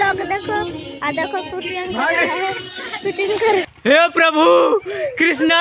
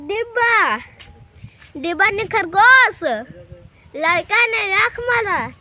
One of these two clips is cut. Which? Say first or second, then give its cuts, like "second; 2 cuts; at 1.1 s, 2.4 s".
first; 1 cut; at 3.7 s